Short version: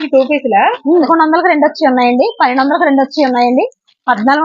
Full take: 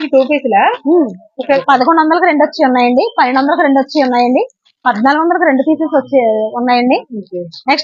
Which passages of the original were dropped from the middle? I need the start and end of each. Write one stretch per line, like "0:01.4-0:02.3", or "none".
0:01.1-0:01.8

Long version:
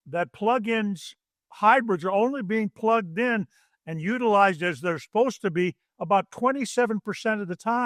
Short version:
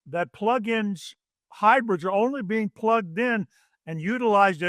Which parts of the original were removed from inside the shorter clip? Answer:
none

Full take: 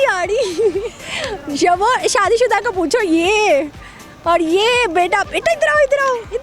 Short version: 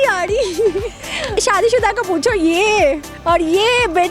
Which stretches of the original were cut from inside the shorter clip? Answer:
0:01.3-0:02.0
0:03.8-0:04.1

